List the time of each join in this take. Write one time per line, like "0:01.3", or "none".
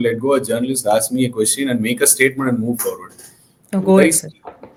none